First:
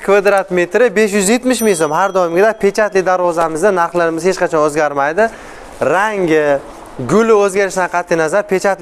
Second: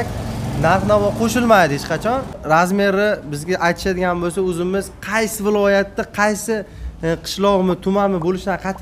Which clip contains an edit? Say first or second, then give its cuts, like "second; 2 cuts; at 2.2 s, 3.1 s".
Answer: second; 1 cut; at 2.4 s